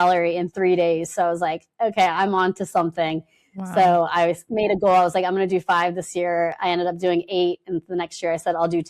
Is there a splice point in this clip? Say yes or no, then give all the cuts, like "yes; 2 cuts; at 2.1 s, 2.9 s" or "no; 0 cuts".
no; 0 cuts